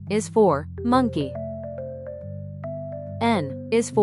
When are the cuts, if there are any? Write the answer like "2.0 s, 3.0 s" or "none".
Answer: 1.3 s, 3.1 s